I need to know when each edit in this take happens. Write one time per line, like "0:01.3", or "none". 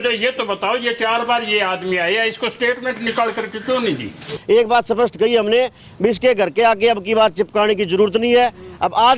0:04.3